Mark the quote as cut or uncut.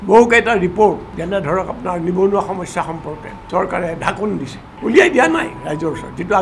cut